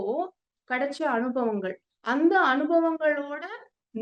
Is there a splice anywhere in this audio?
no; 0 cuts

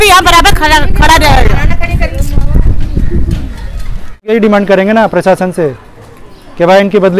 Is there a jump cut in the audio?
yes; 1 cut; at 4.3 s

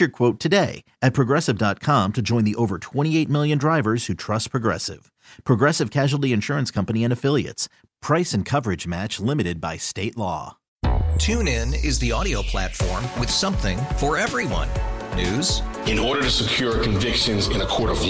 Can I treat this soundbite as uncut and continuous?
no; 1 cut; at 10.6 s

